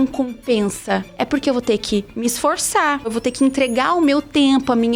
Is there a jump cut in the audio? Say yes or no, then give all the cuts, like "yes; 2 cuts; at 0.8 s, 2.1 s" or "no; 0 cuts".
yes; 1 cut; at 3.1 s